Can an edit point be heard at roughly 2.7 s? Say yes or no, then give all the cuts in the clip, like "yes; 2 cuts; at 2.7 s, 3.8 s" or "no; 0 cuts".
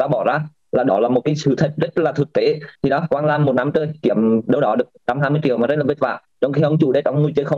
yes; 1 cut; at 2.7 s